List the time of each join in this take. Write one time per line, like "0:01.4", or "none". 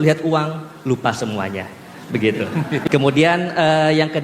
0:02.8